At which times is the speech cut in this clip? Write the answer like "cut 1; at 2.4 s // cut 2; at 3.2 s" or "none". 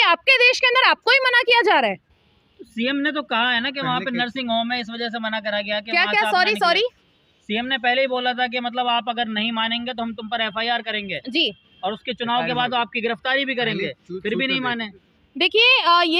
none